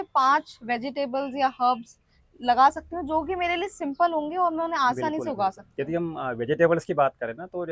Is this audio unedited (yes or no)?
yes